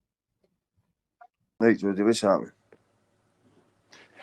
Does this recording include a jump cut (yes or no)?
yes